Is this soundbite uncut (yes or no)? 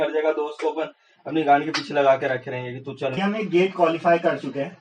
no